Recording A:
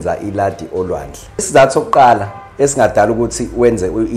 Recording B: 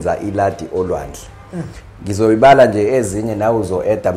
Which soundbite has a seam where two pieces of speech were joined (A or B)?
A